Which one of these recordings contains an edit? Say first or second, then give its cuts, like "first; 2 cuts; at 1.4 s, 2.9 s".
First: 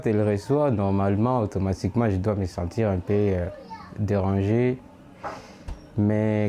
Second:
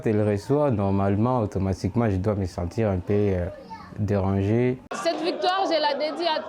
second; 1 cut; at 4.9 s